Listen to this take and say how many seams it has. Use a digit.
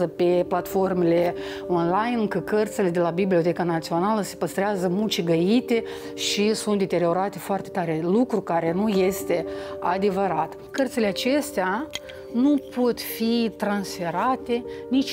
1